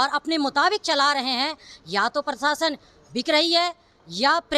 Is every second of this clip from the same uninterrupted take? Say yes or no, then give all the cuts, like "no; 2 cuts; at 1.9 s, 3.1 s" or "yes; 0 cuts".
yes; 0 cuts